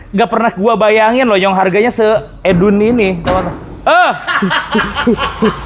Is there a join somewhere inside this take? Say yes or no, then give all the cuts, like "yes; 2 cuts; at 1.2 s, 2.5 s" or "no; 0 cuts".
yes; 1 cut; at 2.8 s